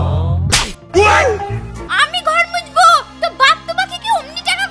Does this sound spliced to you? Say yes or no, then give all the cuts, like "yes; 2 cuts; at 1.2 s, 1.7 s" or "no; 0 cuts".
yes; 1 cut; at 1.8 s